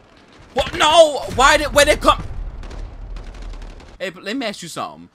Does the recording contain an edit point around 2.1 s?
no; 1 cut; at 3.9 s

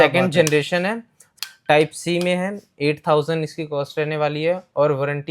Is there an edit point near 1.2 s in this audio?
yes; 1 cut; at 1.2 s

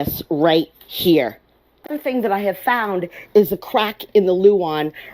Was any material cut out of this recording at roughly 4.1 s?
no; 1 cut; at 1.9 s

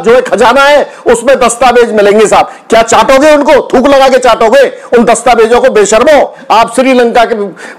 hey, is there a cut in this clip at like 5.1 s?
no; 1 cut; at 6.4 s

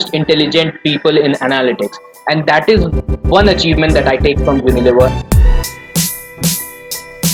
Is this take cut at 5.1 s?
yes; 1 cut; at 5.1 s

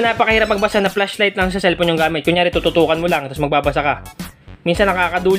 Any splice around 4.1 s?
no; 0 cuts

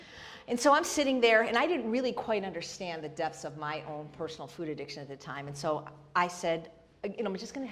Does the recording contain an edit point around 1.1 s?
no; 1 cut; at 4.2 s

